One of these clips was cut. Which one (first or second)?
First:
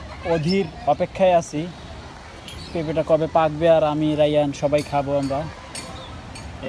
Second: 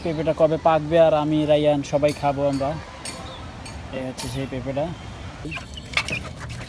second